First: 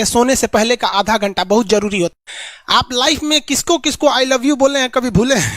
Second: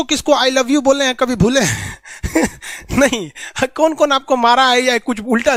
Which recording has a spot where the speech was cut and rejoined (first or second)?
first